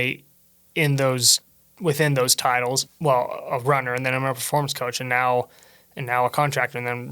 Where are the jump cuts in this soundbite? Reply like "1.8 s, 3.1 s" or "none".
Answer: 2.9 s

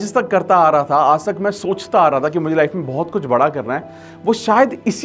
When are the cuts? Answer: none

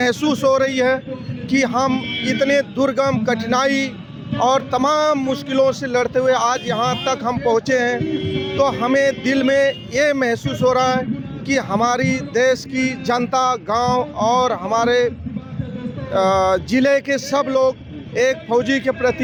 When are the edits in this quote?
none

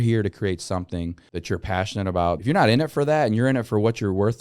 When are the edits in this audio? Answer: 1.3 s, 2.4 s

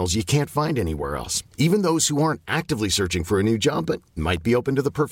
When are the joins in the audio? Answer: none

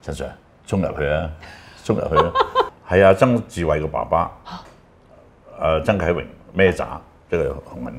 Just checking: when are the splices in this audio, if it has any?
2.7 s

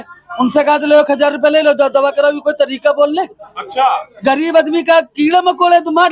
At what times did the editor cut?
none

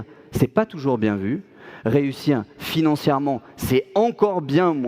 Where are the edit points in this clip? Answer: none

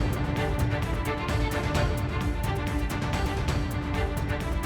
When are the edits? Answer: 3.2 s

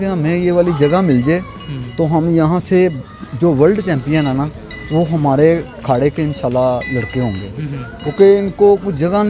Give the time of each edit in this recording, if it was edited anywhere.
none

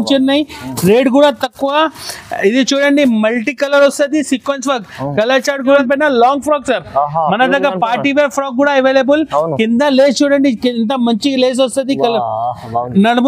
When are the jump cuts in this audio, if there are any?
5.8 s

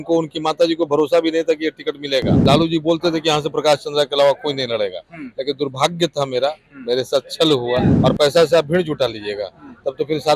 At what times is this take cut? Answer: 2.3 s, 7.9 s

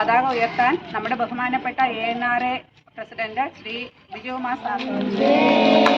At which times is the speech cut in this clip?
4.8 s

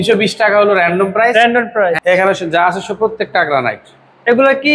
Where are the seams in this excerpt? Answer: 2.0 s

